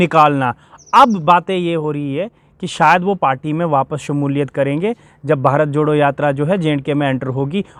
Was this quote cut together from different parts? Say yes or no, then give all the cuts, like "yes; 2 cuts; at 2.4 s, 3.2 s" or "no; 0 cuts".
no; 0 cuts